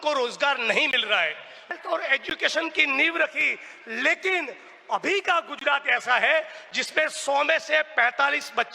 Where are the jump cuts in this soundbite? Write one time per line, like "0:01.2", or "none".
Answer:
0:01.7